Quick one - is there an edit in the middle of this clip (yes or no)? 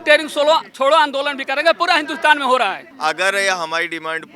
yes